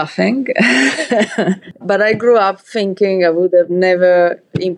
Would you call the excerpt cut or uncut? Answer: cut